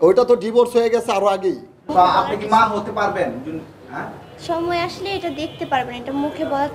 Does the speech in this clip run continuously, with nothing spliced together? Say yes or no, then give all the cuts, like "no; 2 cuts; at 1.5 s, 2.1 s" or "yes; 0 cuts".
no; 1 cut; at 1.7 s